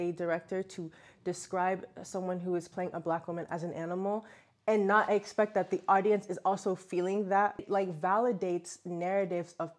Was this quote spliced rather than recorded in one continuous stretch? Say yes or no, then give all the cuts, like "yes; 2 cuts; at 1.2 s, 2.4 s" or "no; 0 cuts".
yes; 1 cut; at 7.7 s